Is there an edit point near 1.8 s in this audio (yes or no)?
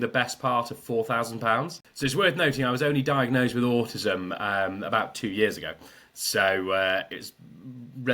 yes